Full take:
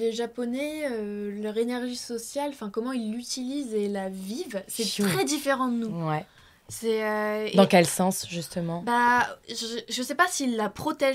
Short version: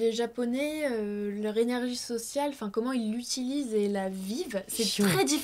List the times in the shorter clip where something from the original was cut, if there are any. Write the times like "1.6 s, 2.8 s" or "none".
none